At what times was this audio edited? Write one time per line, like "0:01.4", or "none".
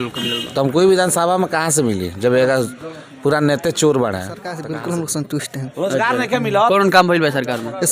0:04.5